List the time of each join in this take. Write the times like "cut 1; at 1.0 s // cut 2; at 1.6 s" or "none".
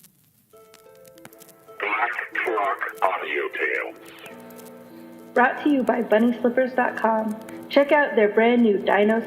cut 1; at 1.8 s